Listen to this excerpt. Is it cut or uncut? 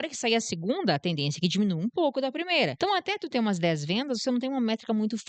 cut